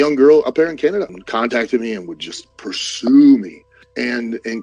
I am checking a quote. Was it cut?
yes; 1 cut; at 1.2 s

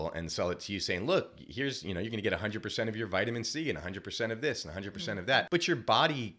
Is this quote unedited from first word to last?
no; 1 cut; at 5.5 s

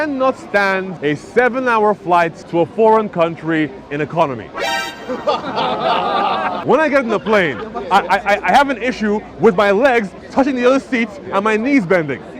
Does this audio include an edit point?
yes; 3 cuts; at 0.9 s, 2.4 s, 6.6 s

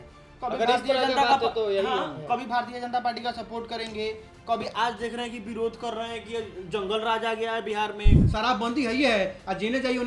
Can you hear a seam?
yes; 1 cut; at 8.2 s

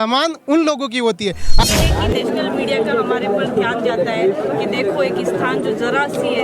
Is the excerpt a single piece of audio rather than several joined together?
no; 1 cut; at 1.7 s

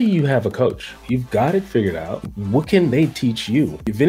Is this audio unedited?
no; 1 cut; at 0.9 s

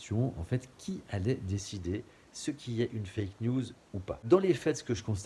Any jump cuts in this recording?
yes; 1 cut; at 4.1 s

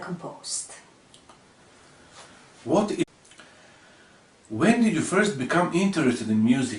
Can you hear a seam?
no; 0 cuts

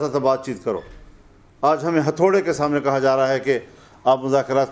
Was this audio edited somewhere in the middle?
no; 0 cuts

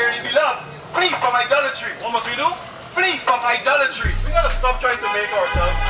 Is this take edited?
no; 0 cuts

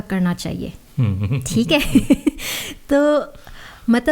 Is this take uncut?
yes; 0 cuts

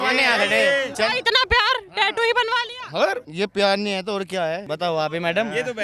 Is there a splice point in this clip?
yes; 3 cuts; at 0.9 s, 3.3 s, 4.7 s

